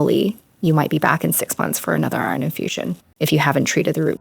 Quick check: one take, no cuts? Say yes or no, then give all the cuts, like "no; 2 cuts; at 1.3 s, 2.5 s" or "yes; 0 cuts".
no; 1 cut; at 3.0 s